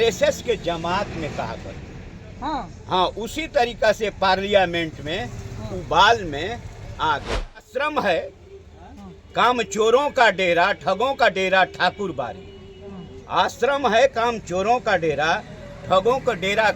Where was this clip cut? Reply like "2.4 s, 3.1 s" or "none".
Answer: 7.7 s